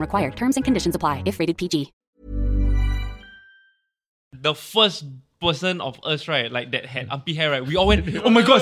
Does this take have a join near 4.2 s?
yes; 1 cut; at 4.2 s

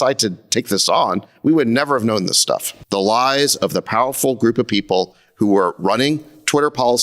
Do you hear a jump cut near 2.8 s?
yes; 1 cut; at 2.8 s

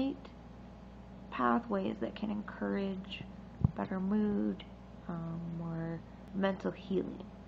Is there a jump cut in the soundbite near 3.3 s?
no; 1 cut; at 6.2 s

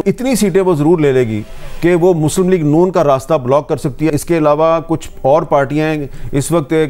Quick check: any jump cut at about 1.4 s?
no; 0 cuts

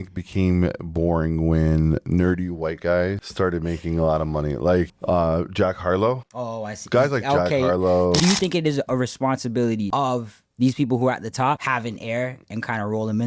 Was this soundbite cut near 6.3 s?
yes; 6 cuts; at 3.2 s, 5.0 s, 6.3 s, 8.2 s, 9.9 s, 11.6 s

